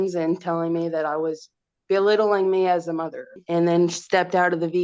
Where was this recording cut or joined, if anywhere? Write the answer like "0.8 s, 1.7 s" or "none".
3.3 s

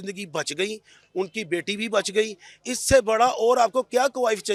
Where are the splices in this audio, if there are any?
none

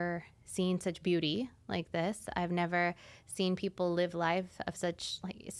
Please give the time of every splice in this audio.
none

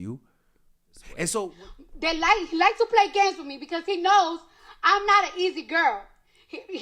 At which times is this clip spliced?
1.6 s

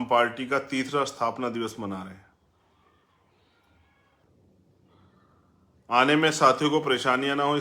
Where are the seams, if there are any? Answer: 4.2 s

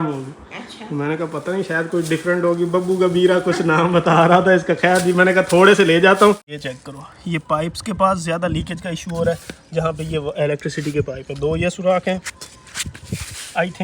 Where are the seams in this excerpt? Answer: 6.5 s

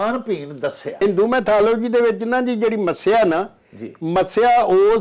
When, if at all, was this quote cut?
1.0 s

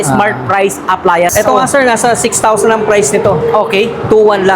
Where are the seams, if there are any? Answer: 1.3 s

